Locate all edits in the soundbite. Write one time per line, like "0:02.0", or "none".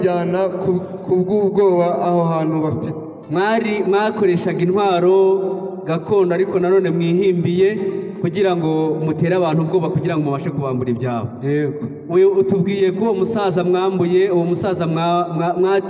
none